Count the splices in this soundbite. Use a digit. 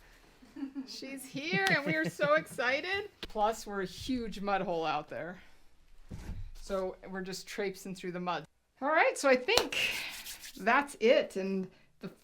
2